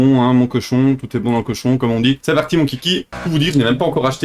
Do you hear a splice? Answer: yes; 2 cuts; at 2.2 s, 3.1 s

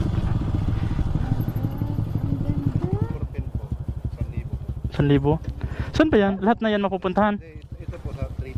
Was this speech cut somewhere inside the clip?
no; 0 cuts

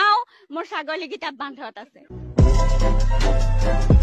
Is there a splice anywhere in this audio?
no; 0 cuts

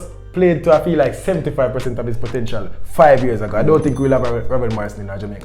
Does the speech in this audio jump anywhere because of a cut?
no; 0 cuts

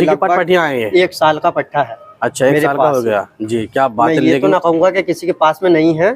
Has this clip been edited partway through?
no; 0 cuts

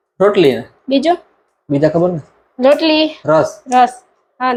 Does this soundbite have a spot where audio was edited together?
no; 0 cuts

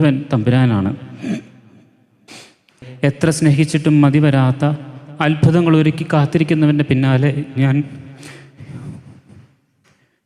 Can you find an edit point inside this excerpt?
yes; 1 cut; at 2.7 s

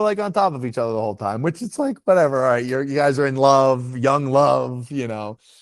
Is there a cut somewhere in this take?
no; 0 cuts

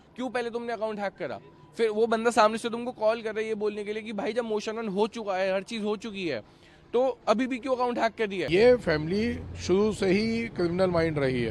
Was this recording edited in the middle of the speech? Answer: yes; 1 cut; at 8.4 s

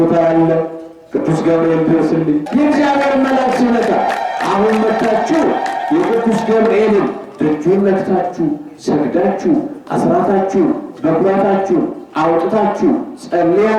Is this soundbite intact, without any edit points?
no; 1 cut; at 2.4 s

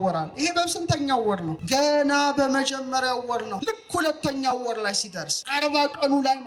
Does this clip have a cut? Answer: yes; 3 cuts; at 1.5 s, 3.5 s, 5.3 s

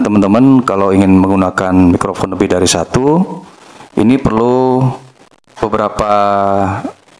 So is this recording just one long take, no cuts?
yes; 0 cuts

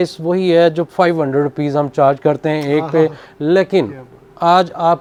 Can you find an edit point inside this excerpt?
no; 0 cuts

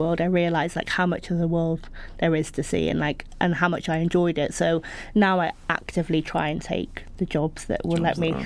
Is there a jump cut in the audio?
no; 0 cuts

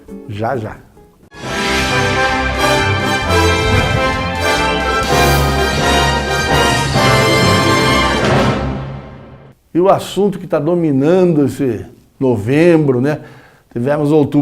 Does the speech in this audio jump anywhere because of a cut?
yes; 1 cut; at 4.9 s

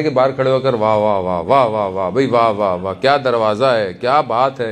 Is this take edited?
no; 0 cuts

